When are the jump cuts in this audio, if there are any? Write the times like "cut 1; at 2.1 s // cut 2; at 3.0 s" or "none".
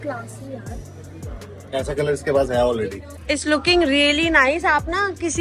cut 1; at 3.1 s